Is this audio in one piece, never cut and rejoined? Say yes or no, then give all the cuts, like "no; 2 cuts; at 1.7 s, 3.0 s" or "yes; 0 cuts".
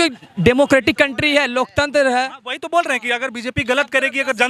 yes; 0 cuts